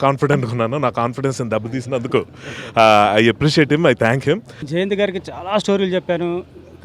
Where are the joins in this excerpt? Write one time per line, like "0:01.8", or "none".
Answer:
0:04.5